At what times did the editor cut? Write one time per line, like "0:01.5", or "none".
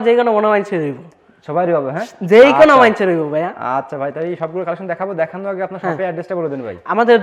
none

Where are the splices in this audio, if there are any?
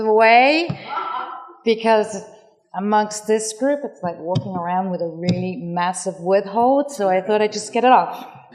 none

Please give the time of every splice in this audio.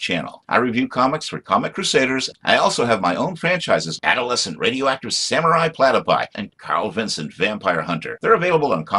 none

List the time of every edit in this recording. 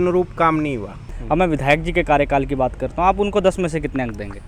0:01.1

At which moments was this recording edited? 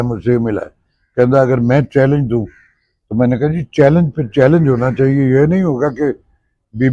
none

